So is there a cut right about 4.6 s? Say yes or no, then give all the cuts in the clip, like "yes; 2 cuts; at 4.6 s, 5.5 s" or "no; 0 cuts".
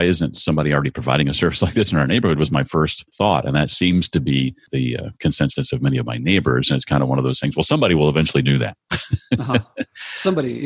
yes; 2 cuts; at 3.0 s, 4.6 s